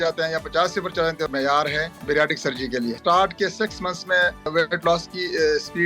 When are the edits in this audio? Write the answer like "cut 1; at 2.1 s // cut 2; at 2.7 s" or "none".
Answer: cut 1; at 1.5 s // cut 2; at 3.0 s // cut 3; at 4.5 s